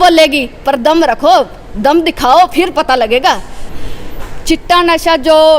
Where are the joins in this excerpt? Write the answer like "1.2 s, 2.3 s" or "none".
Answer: 3.6 s